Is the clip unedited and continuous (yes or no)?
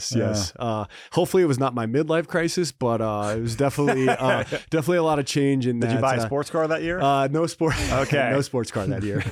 yes